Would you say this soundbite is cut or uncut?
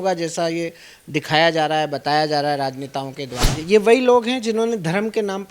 cut